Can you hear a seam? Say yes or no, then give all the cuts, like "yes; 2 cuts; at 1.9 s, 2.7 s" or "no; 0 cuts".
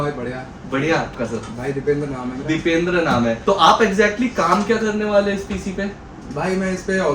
yes; 2 cuts; at 1.1 s, 3.4 s